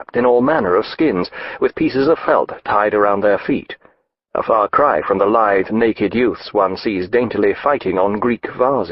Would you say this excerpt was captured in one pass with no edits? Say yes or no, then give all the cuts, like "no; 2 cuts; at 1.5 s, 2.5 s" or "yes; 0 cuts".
yes; 0 cuts